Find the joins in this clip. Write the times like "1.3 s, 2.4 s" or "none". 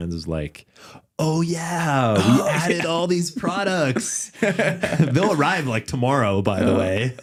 none